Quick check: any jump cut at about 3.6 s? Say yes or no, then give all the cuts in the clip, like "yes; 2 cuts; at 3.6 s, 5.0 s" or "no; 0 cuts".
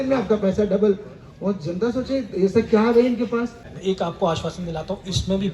yes; 1 cut; at 3.6 s